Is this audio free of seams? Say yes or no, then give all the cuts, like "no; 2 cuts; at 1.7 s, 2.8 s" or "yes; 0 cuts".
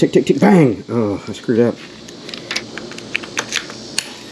no; 1 cut; at 2.6 s